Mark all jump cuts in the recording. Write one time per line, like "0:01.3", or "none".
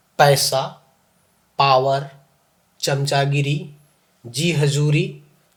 none